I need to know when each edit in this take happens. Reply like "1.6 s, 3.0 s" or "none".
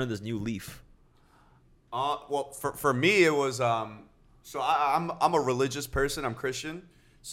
none